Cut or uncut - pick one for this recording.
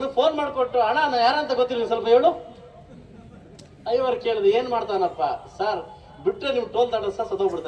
uncut